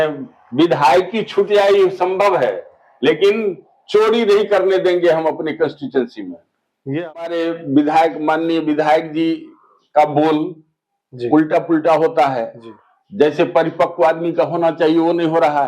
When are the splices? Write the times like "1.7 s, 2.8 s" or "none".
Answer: 7.2 s